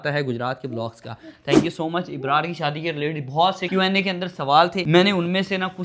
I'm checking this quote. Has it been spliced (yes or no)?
no